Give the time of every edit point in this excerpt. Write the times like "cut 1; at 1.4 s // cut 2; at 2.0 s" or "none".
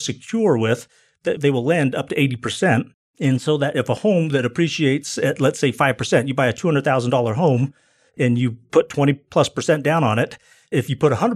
cut 1; at 1.4 s